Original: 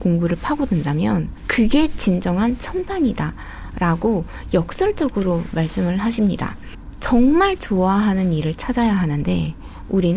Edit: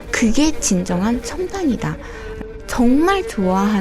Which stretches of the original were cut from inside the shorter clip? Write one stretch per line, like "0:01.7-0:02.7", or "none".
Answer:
0:03.6-0:06.6